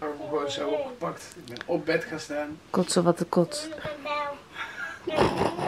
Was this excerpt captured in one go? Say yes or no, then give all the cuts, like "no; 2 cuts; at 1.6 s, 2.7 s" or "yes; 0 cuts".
yes; 0 cuts